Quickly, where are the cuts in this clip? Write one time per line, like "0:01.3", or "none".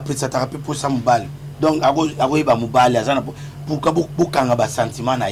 none

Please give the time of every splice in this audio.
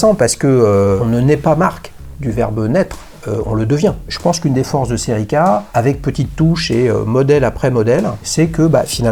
0:01.0
0:04.1
0:05.7
0:08.2

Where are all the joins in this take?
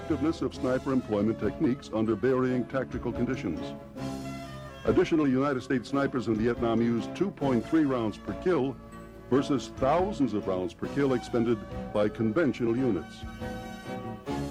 none

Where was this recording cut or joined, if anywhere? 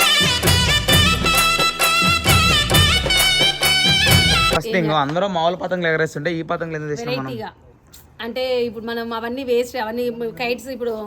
0:04.6

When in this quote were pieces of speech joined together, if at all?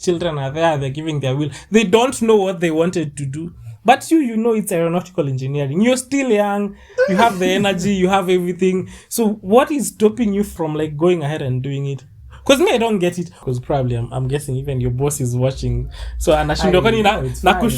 0:10.6
0:13.3

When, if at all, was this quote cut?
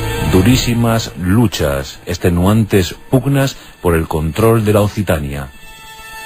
0:03.1

